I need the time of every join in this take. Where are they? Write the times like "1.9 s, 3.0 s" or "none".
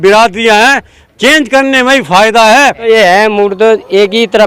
2.8 s

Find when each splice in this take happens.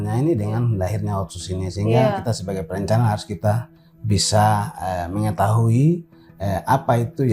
2.2 s

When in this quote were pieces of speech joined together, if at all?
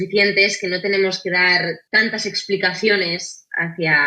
1.8 s

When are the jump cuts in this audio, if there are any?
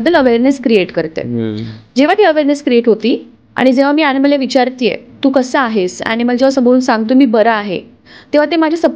none

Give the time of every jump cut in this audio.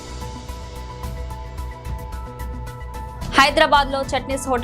3.3 s

